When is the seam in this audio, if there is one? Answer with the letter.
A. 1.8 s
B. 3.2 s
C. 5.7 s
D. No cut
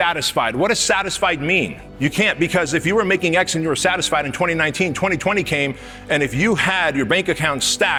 D